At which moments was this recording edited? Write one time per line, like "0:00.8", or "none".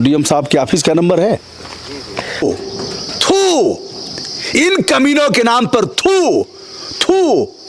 0:02.4